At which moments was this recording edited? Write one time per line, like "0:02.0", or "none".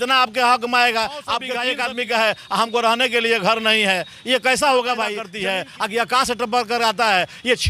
0:01.5
0:05.3